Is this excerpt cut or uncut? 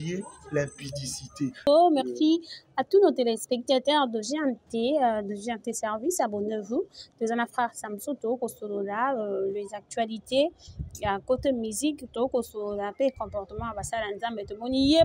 cut